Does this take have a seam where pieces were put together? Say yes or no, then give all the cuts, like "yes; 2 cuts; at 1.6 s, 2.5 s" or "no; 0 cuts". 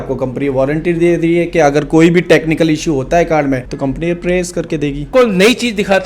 yes; 1 cut; at 5.1 s